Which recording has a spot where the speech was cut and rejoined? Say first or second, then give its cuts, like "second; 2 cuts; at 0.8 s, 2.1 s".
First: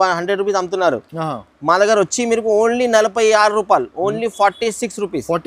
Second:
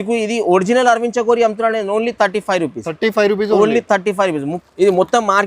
second; 1 cut; at 4.5 s